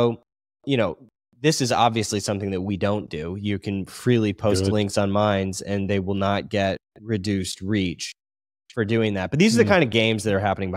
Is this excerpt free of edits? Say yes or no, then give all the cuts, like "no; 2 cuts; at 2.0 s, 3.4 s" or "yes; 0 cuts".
yes; 0 cuts